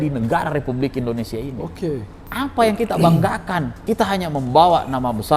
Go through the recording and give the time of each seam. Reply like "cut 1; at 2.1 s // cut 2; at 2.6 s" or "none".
cut 1; at 2.2 s // cut 2; at 3.7 s